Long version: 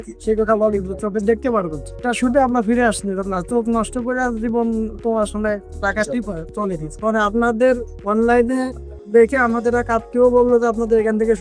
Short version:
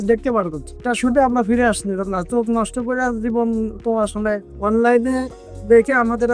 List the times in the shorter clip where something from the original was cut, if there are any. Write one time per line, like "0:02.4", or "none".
0:04.5